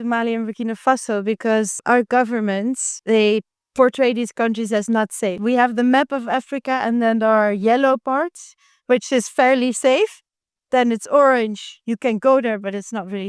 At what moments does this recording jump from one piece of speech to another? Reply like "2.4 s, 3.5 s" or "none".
1.8 s, 2.9 s, 5.4 s